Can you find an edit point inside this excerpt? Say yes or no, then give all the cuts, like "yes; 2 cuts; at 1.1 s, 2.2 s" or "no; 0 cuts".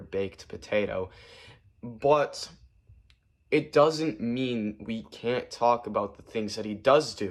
no; 0 cuts